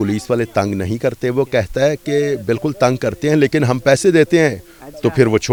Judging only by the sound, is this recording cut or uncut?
uncut